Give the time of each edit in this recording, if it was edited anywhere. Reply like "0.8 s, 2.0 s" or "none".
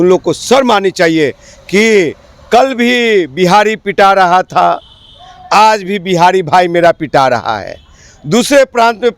none